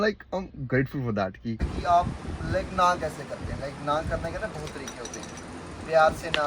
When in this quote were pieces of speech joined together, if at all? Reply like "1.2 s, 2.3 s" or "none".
1.7 s